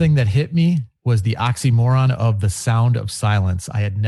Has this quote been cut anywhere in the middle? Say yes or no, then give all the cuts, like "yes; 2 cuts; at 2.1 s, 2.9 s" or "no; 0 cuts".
yes; 1 cut; at 0.9 s